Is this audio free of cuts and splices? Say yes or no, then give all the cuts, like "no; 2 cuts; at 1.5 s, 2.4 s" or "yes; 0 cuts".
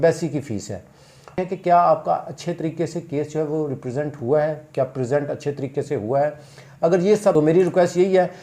no; 2 cuts; at 1.4 s, 7.3 s